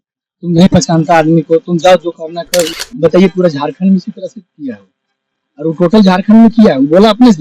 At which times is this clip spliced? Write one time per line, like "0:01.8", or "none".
0:02.8

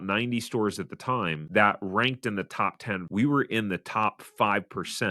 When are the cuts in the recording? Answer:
0:03.1

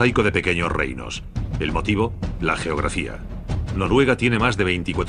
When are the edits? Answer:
0:01.8

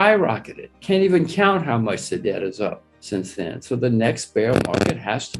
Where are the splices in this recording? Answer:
0:02.9

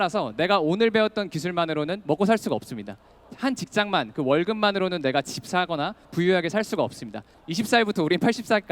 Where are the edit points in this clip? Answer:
0:03.2
0:07.3

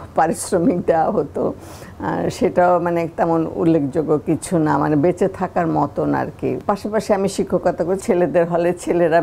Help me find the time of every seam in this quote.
0:06.6
0:08.0

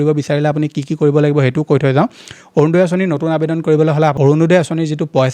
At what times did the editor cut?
0:04.2

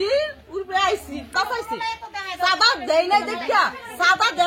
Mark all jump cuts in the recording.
0:01.3

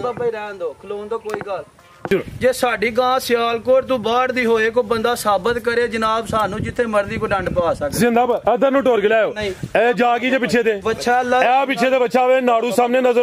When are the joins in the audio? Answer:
0:02.0

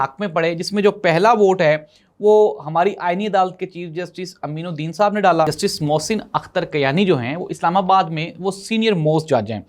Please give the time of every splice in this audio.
0:05.5

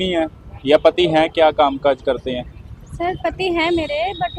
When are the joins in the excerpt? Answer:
none

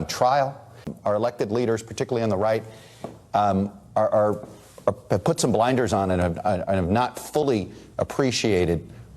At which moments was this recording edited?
0:00.9

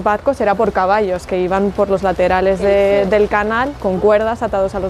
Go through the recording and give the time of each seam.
none

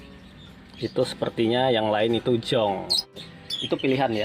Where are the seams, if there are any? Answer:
0:03.2

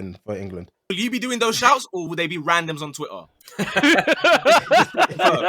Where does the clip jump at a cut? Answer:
0:00.9
0:02.1

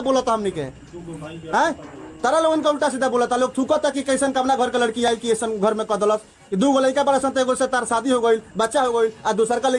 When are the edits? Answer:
none

